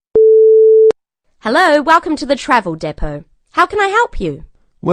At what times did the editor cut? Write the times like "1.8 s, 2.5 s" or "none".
0.9 s